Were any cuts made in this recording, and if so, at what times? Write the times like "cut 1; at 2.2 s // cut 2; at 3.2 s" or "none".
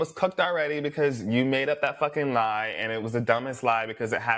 none